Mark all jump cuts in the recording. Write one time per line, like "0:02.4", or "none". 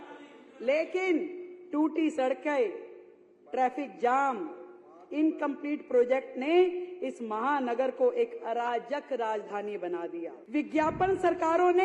0:10.4